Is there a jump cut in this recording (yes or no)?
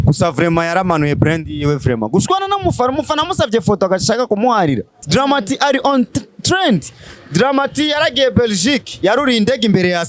yes